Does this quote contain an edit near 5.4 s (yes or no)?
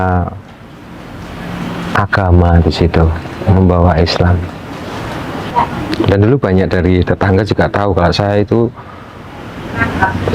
yes